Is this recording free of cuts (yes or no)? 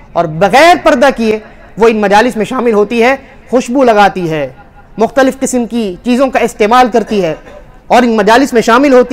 yes